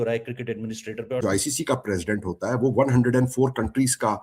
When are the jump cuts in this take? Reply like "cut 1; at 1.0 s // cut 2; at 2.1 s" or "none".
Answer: cut 1; at 1.2 s